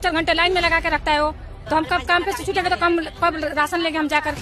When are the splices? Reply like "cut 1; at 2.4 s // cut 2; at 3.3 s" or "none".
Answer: none